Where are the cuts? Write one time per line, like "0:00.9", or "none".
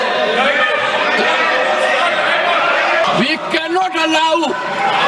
0:03.0